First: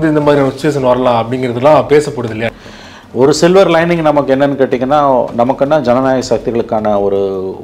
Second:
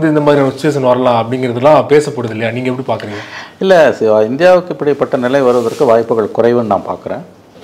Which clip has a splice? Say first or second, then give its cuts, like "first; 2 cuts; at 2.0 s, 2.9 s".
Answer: first; 1 cut; at 2.5 s